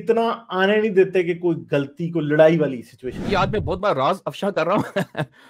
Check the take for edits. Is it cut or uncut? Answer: cut